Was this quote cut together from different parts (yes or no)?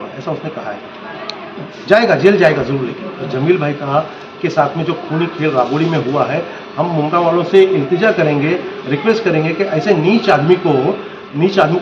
yes